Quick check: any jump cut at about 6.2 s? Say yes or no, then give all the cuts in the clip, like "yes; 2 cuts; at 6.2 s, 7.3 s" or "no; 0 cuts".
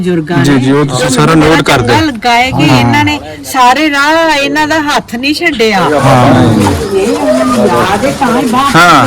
yes; 1 cut; at 6.2 s